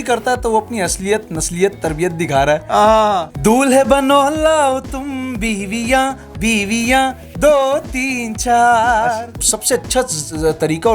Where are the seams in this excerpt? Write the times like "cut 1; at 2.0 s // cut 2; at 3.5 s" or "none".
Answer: cut 1; at 3.3 s // cut 2; at 9.5 s